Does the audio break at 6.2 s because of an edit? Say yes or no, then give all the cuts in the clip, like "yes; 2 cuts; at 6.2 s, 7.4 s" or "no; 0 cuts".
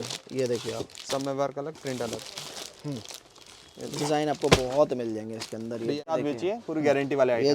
yes; 1 cut; at 6.2 s